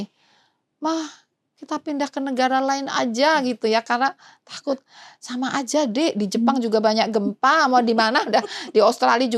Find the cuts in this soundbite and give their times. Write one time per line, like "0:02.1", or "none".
none